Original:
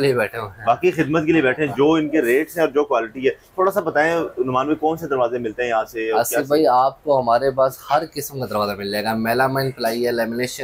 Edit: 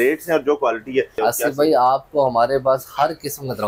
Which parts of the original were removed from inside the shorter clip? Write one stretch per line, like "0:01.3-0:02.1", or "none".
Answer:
0:03.4-0:06.0